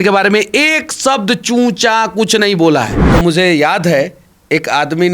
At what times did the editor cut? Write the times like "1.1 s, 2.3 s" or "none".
3.0 s